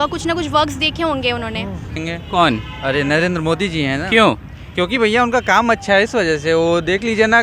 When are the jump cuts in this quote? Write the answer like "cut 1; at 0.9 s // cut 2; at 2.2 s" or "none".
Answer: cut 1; at 2.0 s

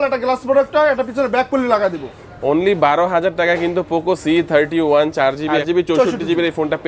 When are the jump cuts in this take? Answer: none

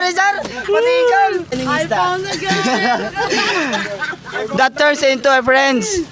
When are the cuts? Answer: cut 1; at 1.5 s

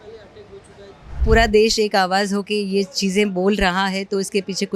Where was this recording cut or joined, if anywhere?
cut 1; at 1.2 s

